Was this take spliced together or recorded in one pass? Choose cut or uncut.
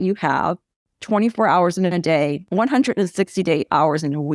uncut